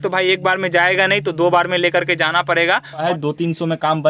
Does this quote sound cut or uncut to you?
cut